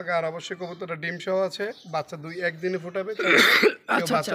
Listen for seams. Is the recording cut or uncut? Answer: uncut